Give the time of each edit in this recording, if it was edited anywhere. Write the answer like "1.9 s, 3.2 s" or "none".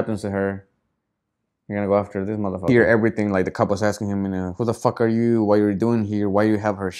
2.6 s